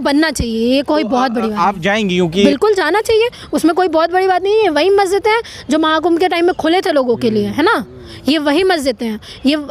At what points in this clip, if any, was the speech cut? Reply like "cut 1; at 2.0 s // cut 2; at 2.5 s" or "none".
cut 1; at 2.4 s